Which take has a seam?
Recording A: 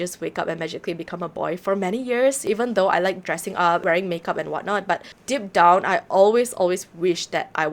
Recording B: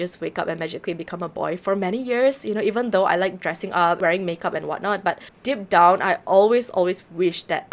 A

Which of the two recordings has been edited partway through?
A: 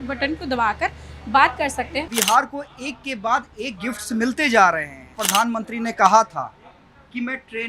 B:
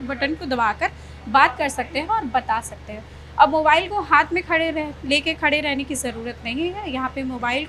A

